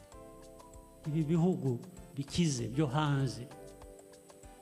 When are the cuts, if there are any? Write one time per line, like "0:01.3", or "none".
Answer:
0:01.0
0:03.5